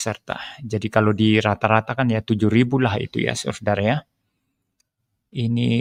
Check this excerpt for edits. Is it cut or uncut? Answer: uncut